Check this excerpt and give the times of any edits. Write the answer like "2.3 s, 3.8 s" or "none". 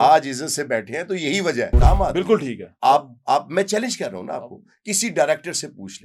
1.7 s